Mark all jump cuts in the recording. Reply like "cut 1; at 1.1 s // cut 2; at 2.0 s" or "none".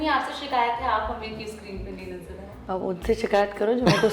cut 1; at 2.5 s